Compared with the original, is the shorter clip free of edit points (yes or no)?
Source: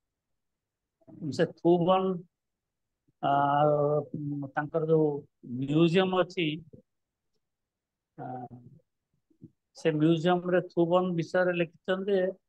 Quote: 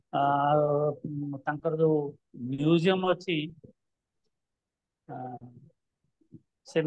yes